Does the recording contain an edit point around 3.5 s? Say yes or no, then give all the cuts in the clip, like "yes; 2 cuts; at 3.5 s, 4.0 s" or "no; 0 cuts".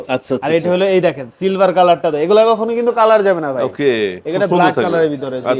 no; 0 cuts